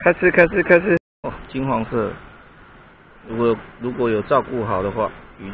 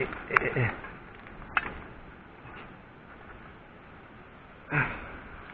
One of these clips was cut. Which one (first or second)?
first